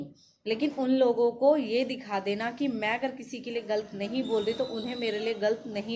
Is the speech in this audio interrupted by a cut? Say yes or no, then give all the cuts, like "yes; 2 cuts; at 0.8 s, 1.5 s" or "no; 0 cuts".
no; 0 cuts